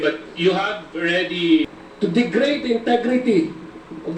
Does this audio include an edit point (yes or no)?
yes